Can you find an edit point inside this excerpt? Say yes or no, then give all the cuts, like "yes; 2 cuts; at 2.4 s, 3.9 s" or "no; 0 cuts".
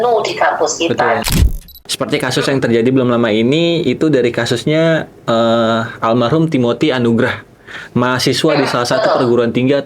yes; 1 cut; at 1.3 s